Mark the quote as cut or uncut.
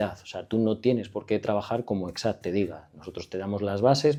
uncut